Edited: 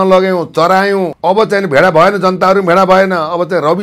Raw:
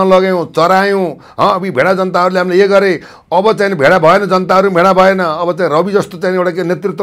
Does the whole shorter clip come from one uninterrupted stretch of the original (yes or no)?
no